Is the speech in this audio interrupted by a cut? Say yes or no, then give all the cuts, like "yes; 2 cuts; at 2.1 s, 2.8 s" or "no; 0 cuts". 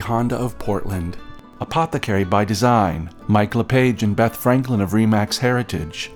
no; 0 cuts